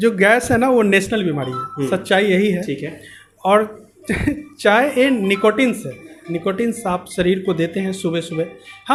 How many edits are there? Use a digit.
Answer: 0